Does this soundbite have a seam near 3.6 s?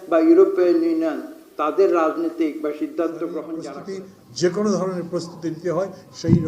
yes; 1 cut; at 3.6 s

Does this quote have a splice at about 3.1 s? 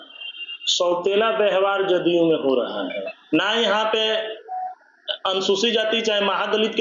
yes; 1 cut; at 3.1 s

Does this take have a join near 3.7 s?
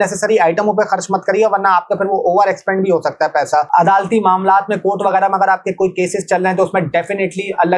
yes; 1 cut; at 3.7 s

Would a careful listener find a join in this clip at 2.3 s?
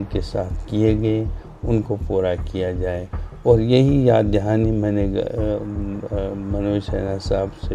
no; 0 cuts

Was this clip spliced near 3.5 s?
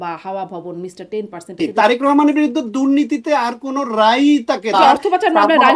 no; 2 cuts; at 1.6 s, 4.7 s

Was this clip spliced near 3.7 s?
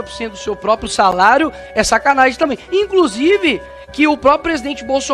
no; 0 cuts

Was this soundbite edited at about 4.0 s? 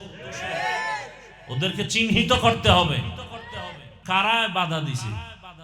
yes; 1 cut; at 4.0 s

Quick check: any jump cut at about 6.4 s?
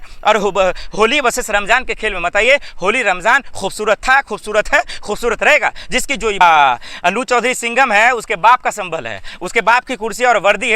yes; 1 cut; at 6.4 s

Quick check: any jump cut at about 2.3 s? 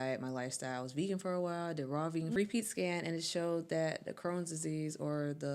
yes; 1 cut; at 2.3 s

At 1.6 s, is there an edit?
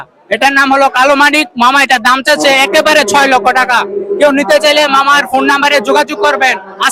no; 0 cuts

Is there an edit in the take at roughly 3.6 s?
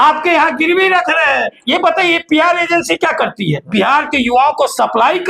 yes; 2 cuts; at 1.6 s, 3.6 s

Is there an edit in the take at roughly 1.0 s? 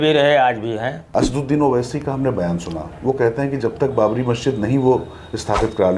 yes; 1 cut; at 1.0 s

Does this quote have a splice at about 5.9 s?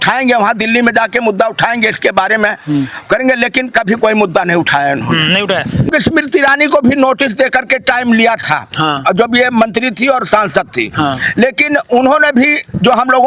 yes; 1 cut; at 5.9 s

